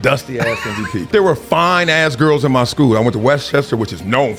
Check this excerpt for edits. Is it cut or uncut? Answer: cut